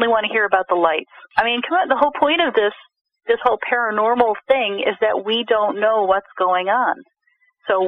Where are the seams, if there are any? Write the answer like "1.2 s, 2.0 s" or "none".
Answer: 1.1 s